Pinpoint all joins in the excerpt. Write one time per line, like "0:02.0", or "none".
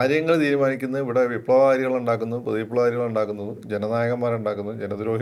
none